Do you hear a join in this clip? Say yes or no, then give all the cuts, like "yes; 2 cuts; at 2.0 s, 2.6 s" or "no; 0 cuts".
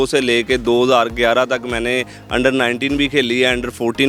no; 0 cuts